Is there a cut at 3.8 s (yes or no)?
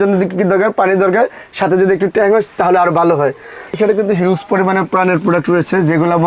yes